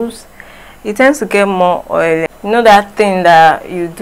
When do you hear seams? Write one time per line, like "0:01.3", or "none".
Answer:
0:02.3